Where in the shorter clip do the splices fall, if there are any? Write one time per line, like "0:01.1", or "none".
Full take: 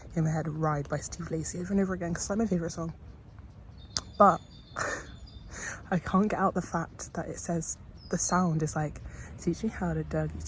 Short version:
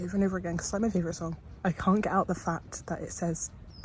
0:01.4